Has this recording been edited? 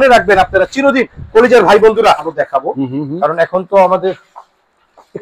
yes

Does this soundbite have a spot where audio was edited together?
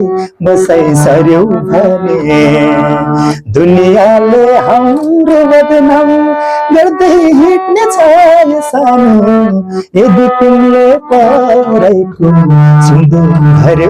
no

